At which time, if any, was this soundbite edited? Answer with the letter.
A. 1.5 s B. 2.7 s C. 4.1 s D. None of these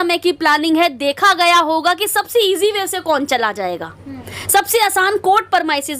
D